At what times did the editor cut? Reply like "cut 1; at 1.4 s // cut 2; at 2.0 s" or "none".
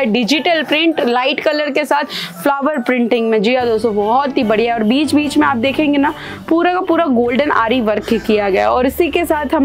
none